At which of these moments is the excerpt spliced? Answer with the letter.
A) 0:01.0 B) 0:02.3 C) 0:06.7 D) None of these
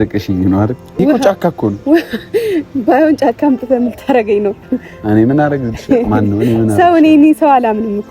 A